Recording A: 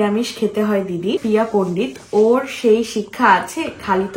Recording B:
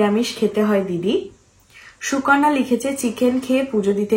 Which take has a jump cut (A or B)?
A